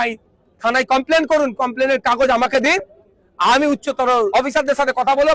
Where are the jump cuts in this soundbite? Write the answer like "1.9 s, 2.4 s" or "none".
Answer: 4.3 s